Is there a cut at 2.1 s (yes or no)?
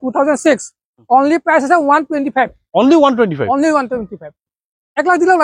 no